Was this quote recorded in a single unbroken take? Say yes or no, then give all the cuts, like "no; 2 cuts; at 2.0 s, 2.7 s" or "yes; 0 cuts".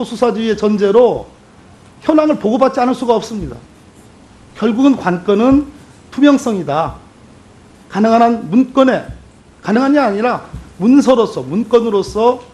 no; 1 cut; at 9.0 s